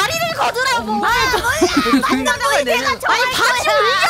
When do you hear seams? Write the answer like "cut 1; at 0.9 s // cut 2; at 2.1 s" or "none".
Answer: cut 1; at 1.1 s